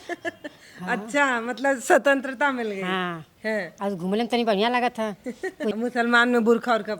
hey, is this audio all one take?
no; 1 cut; at 5.7 s

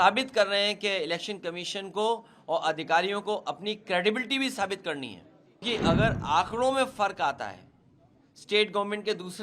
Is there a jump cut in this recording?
yes; 1 cut; at 5.6 s

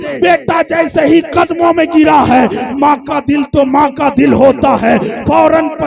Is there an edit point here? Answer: no; 0 cuts

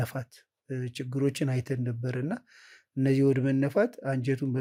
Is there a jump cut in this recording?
no; 0 cuts

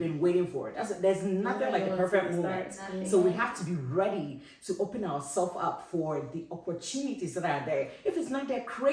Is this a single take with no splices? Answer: yes; 0 cuts

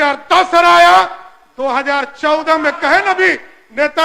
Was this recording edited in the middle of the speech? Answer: no; 0 cuts

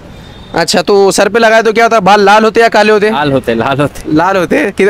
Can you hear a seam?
no; 0 cuts

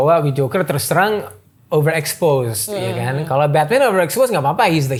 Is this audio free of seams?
yes; 0 cuts

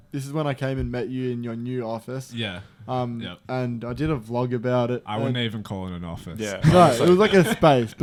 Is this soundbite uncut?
yes; 0 cuts

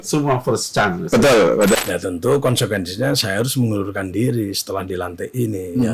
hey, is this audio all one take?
no; 1 cut; at 1.8 s

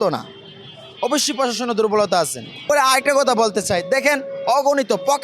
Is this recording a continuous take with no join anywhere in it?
no; 1 cut; at 2.5 s

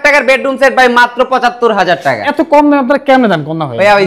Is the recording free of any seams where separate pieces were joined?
no; 1 cut; at 2.3 s

